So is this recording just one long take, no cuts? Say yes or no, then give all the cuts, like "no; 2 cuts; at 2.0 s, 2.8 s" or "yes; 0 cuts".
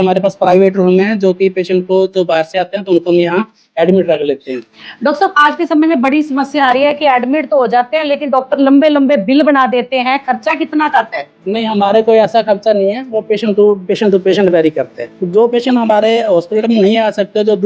no; 1 cut; at 15.2 s